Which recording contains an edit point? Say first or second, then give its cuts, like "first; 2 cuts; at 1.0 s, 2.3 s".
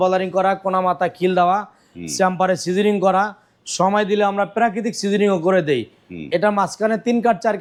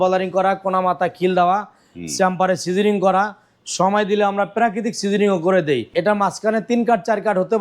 second; 1 cut; at 5.9 s